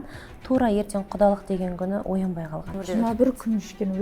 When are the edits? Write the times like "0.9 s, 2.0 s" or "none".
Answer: 2.8 s